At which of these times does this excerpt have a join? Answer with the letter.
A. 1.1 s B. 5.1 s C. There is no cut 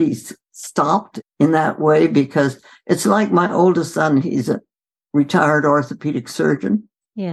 A